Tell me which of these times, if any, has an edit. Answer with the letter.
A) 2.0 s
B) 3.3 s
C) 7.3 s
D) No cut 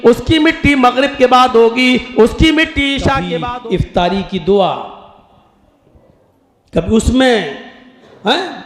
B